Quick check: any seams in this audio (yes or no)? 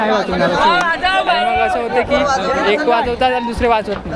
no